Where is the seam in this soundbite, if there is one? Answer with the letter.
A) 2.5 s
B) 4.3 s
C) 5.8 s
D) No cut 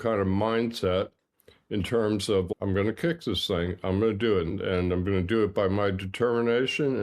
A